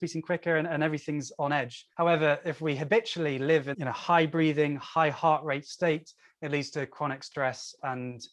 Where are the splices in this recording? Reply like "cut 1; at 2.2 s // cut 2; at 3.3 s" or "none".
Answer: cut 1; at 1.8 s // cut 2; at 3.7 s